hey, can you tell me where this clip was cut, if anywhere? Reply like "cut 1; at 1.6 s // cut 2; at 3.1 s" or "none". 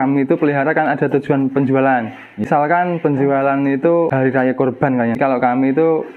cut 1; at 2.5 s // cut 2; at 4.1 s // cut 3; at 5.2 s